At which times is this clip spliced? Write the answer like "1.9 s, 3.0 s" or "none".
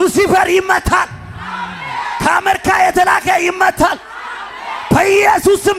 none